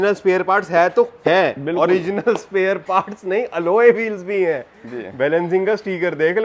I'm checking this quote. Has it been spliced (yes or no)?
no